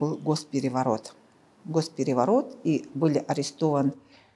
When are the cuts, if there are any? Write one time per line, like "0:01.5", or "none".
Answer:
none